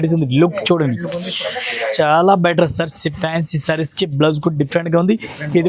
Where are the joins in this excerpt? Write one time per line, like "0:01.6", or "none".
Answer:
none